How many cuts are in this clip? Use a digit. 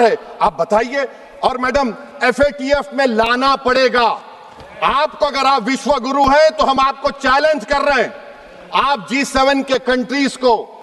0